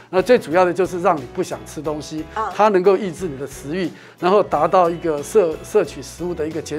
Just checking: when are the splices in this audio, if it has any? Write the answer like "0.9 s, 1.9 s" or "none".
none